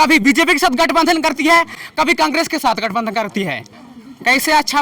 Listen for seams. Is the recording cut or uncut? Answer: cut